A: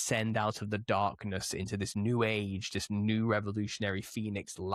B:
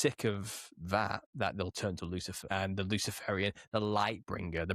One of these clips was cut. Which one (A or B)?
B